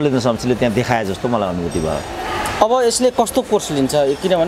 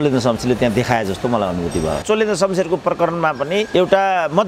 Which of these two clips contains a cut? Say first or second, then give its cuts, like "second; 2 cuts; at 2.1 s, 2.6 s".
second; 1 cut; at 2.0 s